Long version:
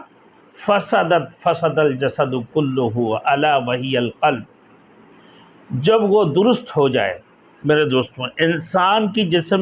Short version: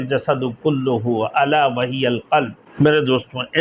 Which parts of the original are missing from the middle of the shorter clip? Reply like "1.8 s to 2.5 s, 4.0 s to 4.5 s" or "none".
4.5 s to 7.5 s